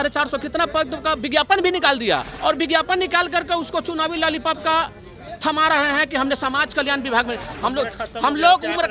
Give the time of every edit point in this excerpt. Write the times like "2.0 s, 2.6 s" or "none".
2.3 s, 7.5 s